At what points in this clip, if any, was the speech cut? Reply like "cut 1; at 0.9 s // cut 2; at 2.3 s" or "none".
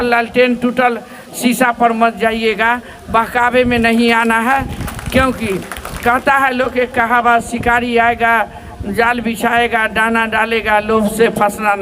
none